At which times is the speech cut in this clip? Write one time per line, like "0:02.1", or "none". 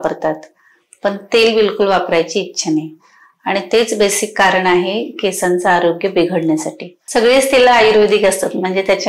0:06.9